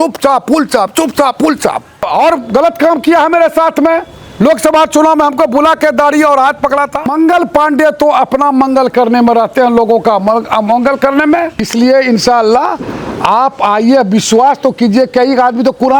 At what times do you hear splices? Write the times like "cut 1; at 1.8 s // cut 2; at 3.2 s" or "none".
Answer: cut 1; at 2.1 s // cut 2; at 7.1 s // cut 3; at 11.6 s

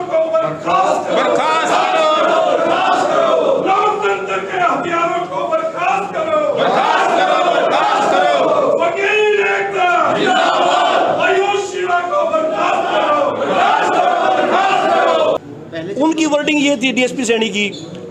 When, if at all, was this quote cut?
cut 1; at 15.4 s

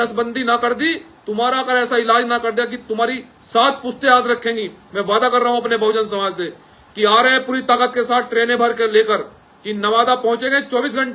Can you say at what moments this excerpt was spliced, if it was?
none

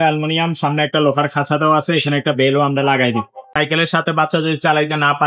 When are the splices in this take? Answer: cut 1; at 3.5 s

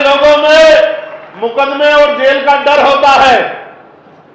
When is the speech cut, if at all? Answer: none

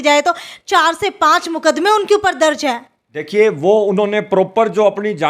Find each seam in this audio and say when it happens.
none

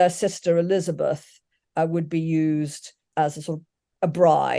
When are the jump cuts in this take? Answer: none

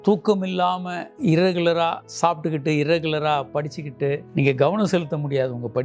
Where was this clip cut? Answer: cut 1; at 4.2 s

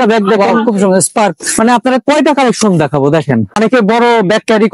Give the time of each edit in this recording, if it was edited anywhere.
cut 1; at 3.6 s

